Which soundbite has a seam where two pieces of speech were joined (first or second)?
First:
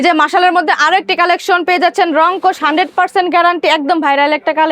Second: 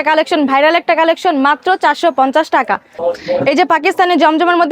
second